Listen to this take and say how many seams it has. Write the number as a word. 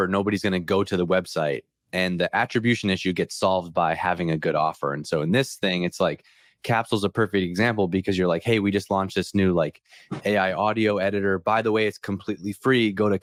zero